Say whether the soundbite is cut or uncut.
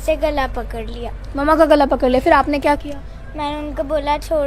uncut